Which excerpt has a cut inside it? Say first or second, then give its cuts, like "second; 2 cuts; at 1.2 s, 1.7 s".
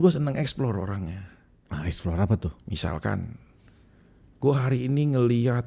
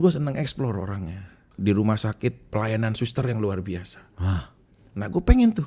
second; 1 cut; at 1.4 s